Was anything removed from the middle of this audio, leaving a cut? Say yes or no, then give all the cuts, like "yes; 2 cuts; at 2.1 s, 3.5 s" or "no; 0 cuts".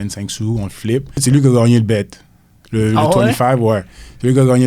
yes; 1 cut; at 1.2 s